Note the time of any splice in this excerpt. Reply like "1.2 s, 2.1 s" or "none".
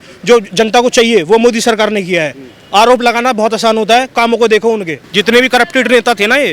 4.1 s, 5.0 s